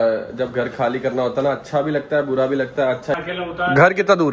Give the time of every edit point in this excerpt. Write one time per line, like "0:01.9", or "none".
0:03.1